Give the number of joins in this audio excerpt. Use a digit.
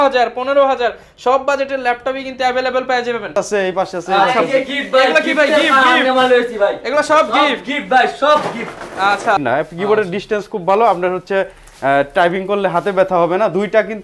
2